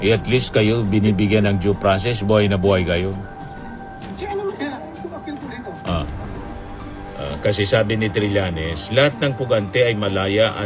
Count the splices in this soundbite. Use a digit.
1